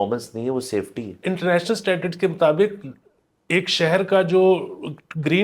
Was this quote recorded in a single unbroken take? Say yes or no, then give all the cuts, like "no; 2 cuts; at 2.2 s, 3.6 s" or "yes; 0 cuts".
no; 1 cut; at 1.2 s